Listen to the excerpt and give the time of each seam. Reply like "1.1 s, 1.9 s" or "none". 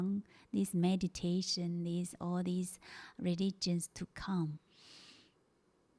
none

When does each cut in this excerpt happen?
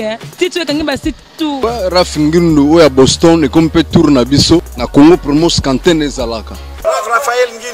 1.6 s, 4.8 s, 6.7 s

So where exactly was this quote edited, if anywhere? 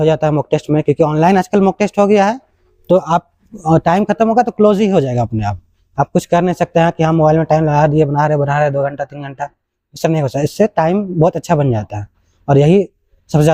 none

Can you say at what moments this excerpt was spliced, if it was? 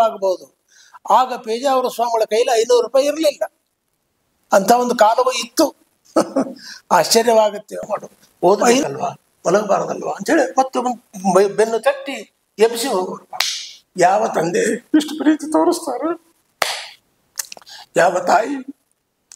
7.8 s

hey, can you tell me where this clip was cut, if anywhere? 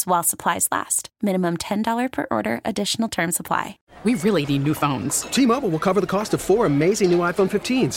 3.8 s

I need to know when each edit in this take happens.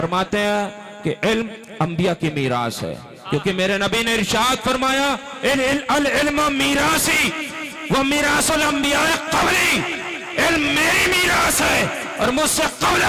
none

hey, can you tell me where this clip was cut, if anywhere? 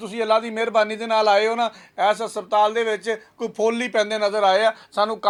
none

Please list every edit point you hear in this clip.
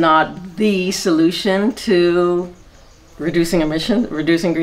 none

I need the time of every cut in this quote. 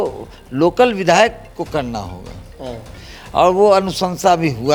none

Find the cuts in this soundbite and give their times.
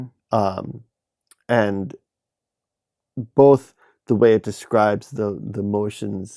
none

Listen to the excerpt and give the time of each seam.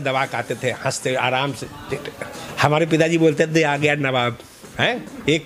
2.4 s

